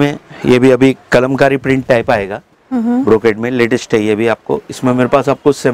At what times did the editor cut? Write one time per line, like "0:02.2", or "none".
none

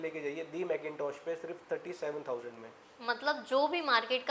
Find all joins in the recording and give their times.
none

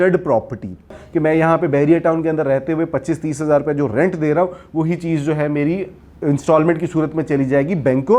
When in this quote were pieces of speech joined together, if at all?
0:01.0

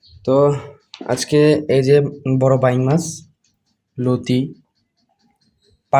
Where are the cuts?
none

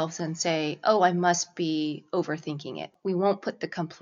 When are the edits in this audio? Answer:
0:02.9

